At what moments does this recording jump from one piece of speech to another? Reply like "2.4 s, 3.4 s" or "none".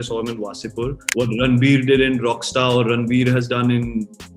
1.0 s